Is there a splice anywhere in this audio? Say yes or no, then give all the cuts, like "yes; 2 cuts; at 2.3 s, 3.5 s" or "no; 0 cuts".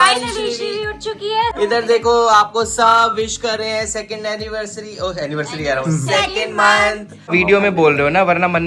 yes; 2 cuts; at 1.5 s, 7.2 s